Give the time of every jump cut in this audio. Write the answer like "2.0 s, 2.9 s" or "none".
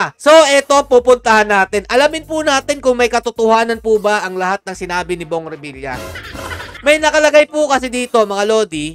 none

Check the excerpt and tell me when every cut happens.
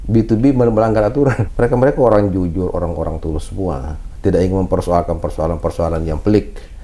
1.4 s

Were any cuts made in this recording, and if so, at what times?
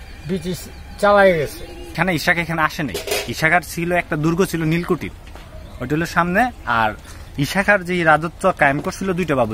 1.9 s

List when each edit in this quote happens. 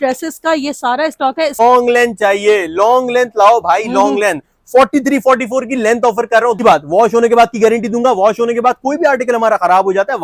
1.6 s, 6.6 s

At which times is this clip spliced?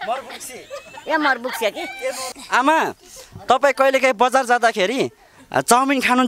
2.3 s

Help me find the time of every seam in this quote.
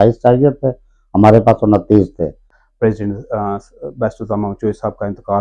none

